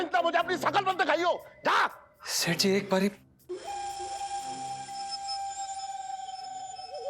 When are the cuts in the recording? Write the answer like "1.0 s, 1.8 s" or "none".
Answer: 3.3 s

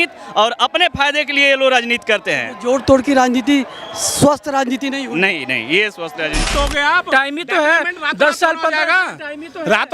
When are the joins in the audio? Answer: 6.4 s

